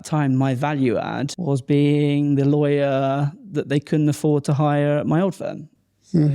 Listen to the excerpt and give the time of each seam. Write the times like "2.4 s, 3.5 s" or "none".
1.3 s